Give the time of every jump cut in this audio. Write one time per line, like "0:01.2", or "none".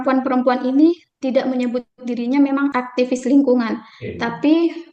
0:02.7

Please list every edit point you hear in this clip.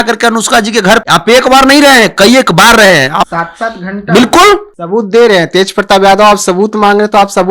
0:01.0
0:03.2
0:04.7

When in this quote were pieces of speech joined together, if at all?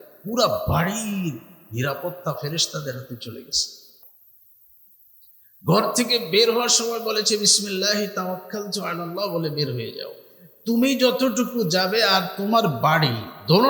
none

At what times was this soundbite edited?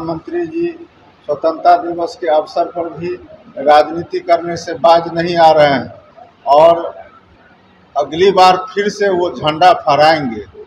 none

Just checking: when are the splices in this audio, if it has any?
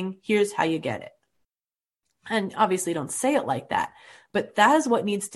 none

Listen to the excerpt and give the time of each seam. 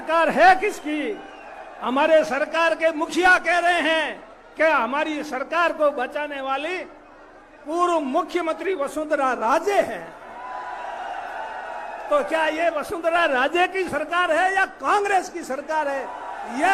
none

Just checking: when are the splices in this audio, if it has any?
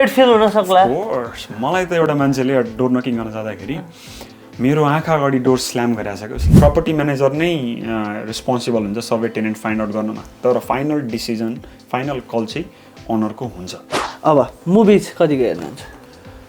0:06.5
0:14.0

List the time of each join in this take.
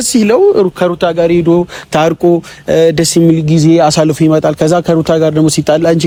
none

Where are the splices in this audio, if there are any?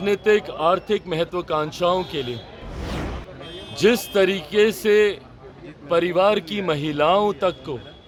none

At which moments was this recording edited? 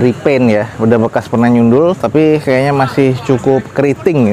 none

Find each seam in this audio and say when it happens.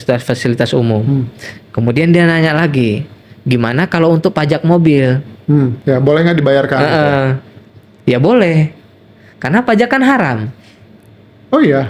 0:05.8

